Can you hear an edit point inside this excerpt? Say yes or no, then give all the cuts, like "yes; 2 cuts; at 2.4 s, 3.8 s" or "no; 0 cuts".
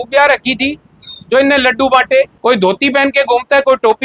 yes; 1 cut; at 2.3 s